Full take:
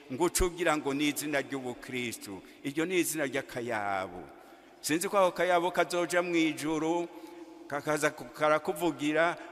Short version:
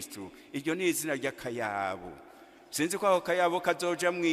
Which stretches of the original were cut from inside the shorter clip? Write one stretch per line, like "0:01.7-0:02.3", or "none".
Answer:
none